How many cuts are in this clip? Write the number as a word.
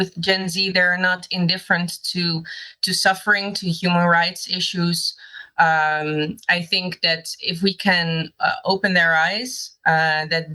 zero